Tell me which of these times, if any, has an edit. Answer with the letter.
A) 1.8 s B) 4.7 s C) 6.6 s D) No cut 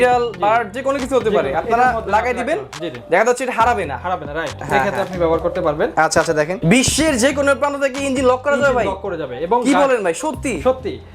C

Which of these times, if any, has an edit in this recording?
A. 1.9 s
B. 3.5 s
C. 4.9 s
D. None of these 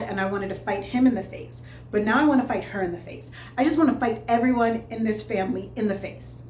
D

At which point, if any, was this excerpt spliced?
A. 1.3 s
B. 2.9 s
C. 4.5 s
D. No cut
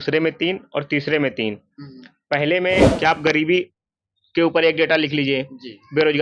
B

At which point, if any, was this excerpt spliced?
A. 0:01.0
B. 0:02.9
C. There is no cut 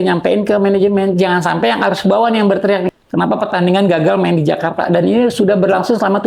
B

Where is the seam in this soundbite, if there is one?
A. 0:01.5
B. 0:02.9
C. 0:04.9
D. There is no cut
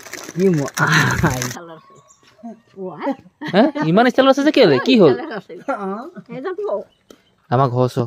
A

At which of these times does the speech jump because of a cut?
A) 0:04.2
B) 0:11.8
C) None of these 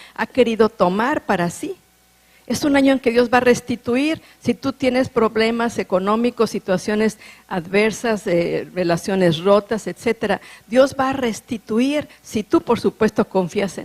B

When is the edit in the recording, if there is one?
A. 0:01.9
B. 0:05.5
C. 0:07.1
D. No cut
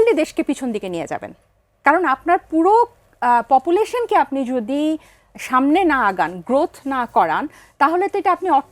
D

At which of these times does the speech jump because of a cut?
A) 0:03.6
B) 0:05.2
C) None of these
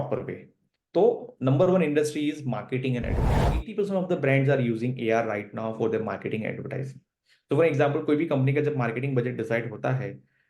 A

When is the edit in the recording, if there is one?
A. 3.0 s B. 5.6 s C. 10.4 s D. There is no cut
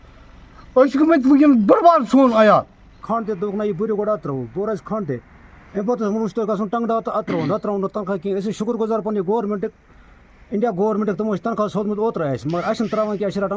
A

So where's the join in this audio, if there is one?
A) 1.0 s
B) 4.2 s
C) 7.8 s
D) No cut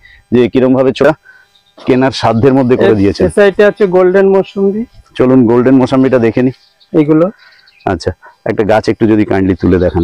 A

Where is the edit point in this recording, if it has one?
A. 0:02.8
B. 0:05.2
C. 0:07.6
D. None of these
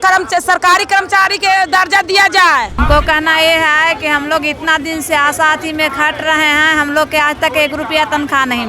A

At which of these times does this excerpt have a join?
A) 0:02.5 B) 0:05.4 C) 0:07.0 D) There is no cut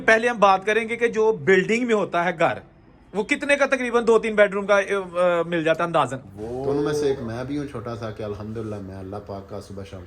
C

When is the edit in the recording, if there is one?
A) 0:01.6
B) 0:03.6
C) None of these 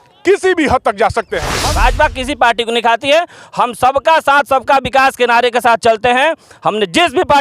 A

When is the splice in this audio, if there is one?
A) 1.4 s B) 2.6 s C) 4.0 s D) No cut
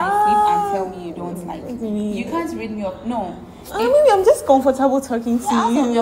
D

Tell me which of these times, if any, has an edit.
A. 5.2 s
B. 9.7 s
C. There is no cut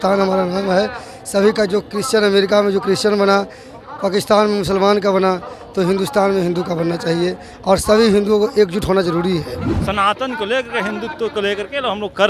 B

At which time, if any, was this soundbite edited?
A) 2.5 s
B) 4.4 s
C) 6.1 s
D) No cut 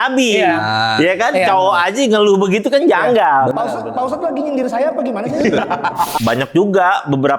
C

